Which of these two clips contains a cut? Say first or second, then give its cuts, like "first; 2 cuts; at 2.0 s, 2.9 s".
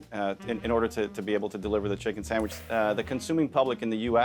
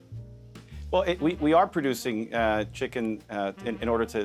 first; 1 cut; at 2.6 s